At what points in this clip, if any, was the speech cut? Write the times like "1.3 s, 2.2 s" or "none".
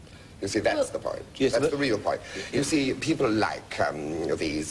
0.9 s